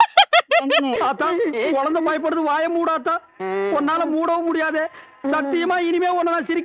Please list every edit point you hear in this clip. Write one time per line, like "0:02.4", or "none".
0:01.0